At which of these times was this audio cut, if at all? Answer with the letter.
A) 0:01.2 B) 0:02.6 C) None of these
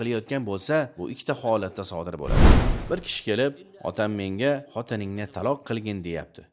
B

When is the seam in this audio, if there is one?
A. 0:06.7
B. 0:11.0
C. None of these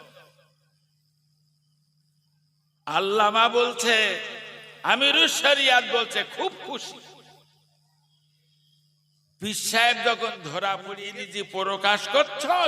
B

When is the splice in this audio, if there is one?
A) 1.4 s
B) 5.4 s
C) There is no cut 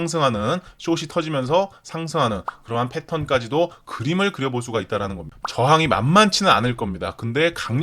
B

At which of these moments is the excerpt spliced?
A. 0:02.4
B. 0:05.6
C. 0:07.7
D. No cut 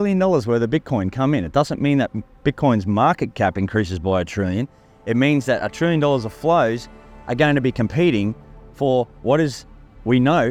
D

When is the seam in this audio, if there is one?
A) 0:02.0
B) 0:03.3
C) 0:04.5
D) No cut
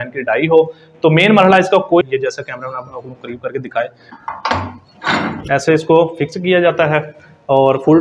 A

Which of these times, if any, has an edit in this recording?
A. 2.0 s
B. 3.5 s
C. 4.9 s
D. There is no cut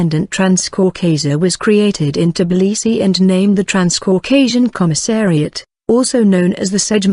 D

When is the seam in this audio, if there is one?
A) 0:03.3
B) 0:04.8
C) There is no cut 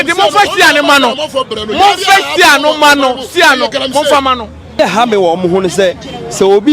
B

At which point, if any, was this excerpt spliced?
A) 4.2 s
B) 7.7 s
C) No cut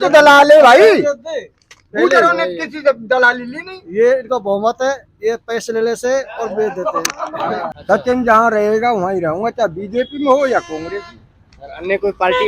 B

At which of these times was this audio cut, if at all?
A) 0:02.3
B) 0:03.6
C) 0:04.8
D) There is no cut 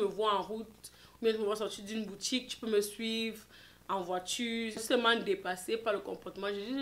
C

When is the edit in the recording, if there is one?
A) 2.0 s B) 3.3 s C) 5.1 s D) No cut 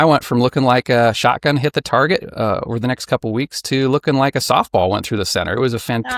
D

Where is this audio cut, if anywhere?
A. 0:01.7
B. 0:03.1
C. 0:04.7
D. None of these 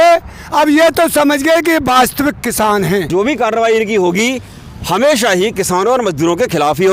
B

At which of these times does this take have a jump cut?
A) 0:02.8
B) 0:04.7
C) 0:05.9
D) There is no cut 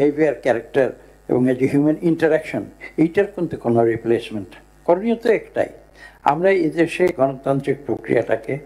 B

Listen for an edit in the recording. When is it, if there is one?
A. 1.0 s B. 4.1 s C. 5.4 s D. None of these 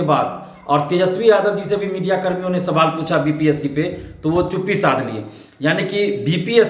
D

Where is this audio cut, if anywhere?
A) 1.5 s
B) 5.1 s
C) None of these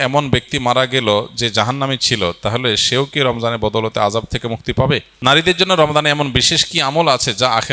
B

